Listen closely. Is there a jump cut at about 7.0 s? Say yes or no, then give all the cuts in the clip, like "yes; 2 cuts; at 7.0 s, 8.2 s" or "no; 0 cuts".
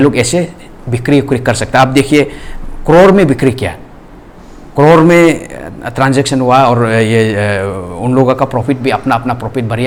no; 0 cuts